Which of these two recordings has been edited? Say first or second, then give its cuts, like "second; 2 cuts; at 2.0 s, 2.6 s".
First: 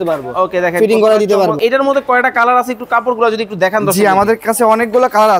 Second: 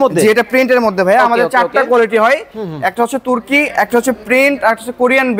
first; 1 cut; at 1.6 s